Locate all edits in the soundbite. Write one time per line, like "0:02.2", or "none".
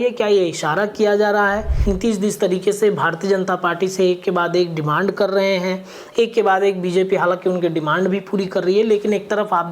0:01.7